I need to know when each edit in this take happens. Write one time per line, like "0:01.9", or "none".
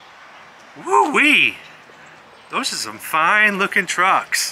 none